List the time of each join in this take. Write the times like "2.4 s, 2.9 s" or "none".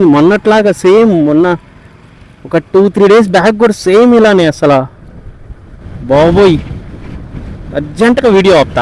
none